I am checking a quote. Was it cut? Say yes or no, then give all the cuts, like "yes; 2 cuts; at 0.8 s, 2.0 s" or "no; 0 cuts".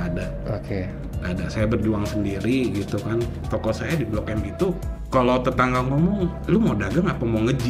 yes; 3 cuts; at 3.4 s, 4.9 s, 6.4 s